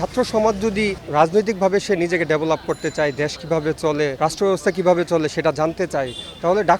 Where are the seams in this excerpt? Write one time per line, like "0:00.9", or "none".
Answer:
0:01.0
0:04.1